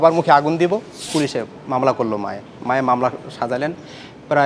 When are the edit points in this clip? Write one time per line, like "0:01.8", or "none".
0:01.0

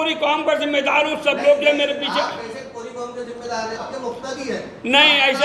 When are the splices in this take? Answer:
0:03.9

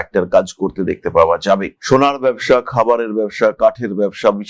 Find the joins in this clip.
none

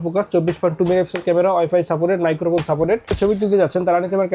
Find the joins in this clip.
0:03.2

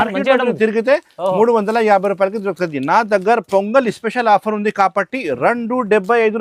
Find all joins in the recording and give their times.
none

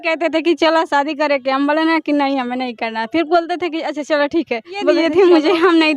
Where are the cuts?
0:05.1

